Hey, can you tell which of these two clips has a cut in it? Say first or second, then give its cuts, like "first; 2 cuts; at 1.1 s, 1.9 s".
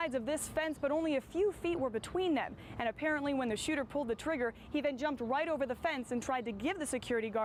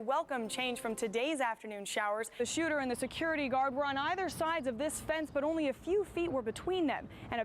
second; 1 cut; at 2.4 s